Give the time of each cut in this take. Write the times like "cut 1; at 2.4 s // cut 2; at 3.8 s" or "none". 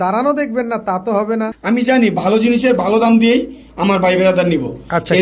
cut 1; at 1.6 s